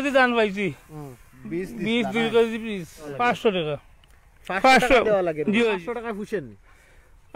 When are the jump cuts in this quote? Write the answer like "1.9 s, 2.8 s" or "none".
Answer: 3.1 s, 5.8 s